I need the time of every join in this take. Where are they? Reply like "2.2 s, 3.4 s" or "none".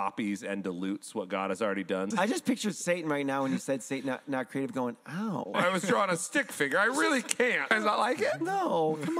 2.1 s, 5.5 s, 7.7 s